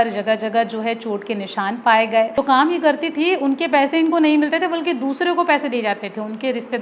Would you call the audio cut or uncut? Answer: cut